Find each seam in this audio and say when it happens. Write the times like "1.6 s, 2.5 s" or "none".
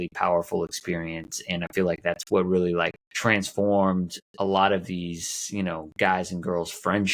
3.0 s, 4.2 s